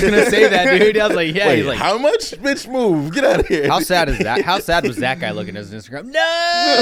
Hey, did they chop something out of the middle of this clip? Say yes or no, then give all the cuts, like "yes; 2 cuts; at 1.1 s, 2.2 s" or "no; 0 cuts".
no; 0 cuts